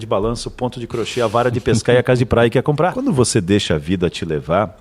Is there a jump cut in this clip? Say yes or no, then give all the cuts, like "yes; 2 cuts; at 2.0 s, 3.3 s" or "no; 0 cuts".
yes; 1 cut; at 3.0 s